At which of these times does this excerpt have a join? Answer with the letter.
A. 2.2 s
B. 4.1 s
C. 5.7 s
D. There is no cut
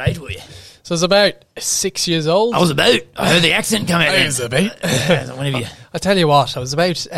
D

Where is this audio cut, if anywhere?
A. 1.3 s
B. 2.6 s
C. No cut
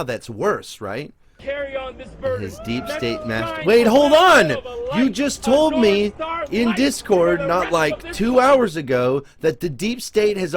A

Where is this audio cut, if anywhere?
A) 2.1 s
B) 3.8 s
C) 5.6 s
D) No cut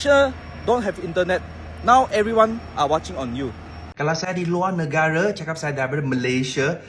B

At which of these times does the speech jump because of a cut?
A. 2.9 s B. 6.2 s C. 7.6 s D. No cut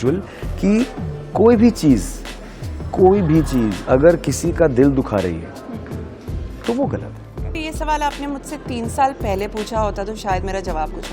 C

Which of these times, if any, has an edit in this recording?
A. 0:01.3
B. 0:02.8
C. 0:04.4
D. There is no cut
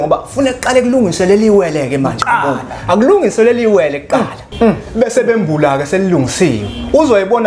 C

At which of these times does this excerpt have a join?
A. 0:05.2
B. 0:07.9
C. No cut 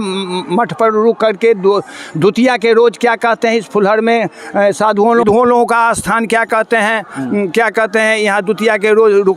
A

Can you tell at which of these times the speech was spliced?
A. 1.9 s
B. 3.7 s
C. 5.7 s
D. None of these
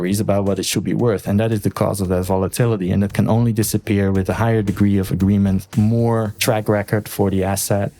C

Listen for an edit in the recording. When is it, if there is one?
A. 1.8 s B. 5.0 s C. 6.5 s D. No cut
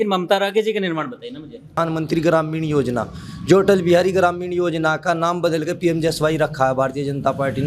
A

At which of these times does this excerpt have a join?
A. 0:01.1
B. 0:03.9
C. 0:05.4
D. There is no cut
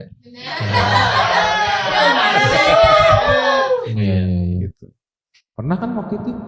B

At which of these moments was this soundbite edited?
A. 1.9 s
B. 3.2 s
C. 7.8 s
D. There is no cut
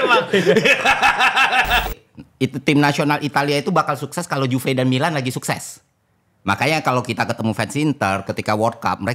A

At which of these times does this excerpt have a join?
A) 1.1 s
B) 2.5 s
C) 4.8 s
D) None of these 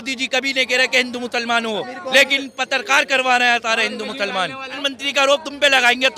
C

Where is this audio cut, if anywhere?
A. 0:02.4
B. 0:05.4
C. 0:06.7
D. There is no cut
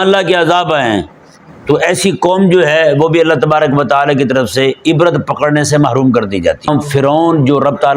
C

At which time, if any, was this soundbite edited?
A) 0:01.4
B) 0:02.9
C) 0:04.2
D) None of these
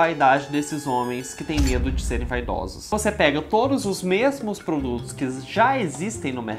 B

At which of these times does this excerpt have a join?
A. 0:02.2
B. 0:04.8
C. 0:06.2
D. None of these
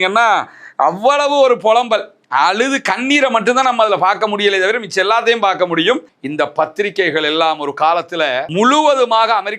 C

